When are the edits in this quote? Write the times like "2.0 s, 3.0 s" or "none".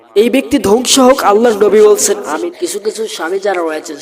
2.6 s